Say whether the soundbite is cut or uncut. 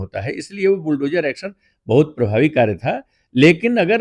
uncut